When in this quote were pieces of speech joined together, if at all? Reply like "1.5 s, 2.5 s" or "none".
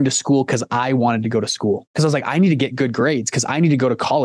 1.9 s